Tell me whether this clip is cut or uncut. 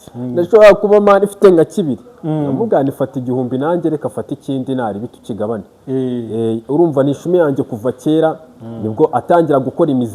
uncut